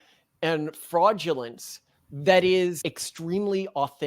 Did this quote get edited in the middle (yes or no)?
yes